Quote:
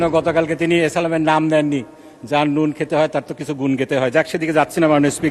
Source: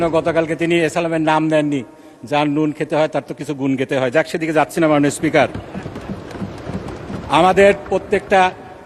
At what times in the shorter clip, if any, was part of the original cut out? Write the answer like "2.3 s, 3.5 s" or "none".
none